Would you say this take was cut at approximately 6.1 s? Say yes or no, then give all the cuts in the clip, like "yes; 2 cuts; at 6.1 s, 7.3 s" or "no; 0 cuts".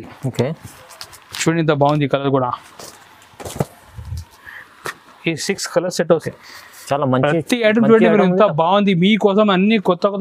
yes; 1 cut; at 6.1 s